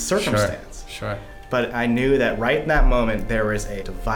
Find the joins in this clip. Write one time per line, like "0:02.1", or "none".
0:01.7

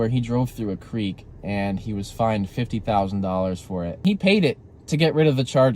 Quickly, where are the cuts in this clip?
0:04.0

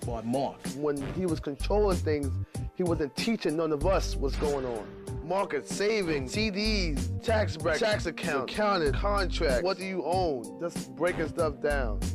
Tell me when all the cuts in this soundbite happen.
0:10.5

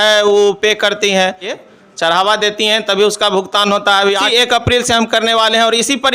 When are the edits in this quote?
0:01.6
0:04.2

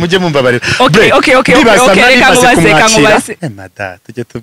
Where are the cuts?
0:03.4

